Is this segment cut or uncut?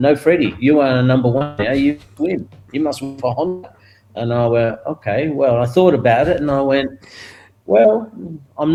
uncut